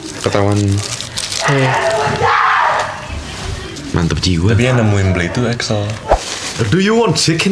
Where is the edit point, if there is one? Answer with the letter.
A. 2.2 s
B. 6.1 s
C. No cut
B